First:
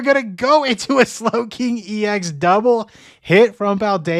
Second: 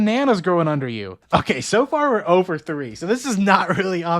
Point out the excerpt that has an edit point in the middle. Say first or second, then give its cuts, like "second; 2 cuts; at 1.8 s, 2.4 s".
second; 1 cut; at 1.1 s